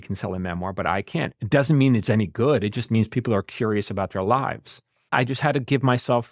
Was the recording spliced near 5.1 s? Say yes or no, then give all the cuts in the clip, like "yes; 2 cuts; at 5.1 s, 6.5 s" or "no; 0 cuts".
yes; 1 cut; at 5.1 s